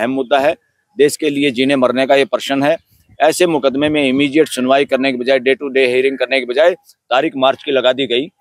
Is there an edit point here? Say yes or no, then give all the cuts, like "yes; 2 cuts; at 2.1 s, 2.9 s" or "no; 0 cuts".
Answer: no; 0 cuts